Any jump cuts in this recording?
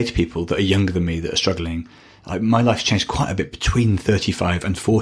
no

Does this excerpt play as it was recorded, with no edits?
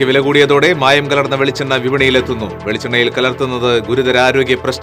yes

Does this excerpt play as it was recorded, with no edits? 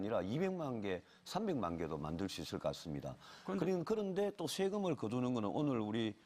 no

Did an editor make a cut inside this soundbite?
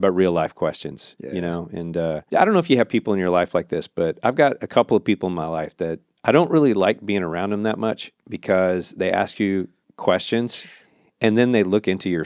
yes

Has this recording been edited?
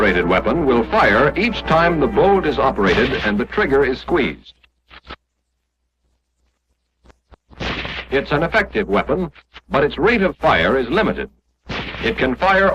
no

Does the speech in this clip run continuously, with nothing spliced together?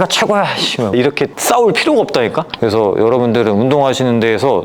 no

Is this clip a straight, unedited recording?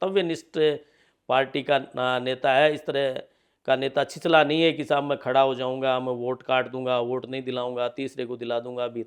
yes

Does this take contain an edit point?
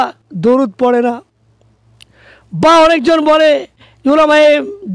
no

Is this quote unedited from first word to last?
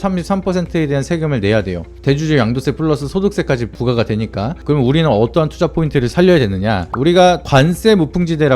no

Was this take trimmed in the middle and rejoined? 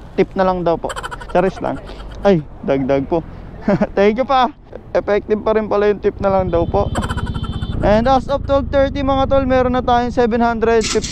yes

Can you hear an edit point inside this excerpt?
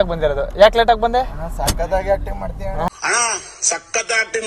no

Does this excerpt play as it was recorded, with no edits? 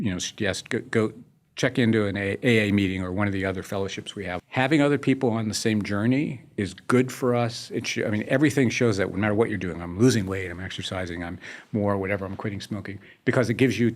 no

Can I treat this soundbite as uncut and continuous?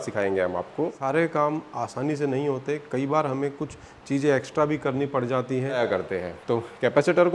no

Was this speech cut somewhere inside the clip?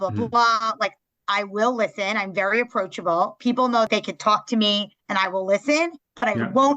yes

